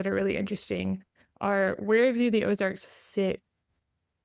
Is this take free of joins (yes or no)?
yes